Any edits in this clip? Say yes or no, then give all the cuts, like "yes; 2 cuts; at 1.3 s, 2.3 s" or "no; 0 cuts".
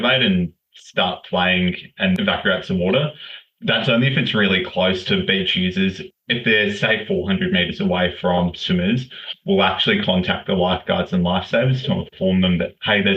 yes; 1 cut; at 2.2 s